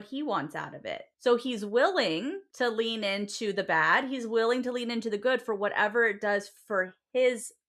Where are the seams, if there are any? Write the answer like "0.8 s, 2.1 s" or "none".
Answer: 1.1 s, 2.4 s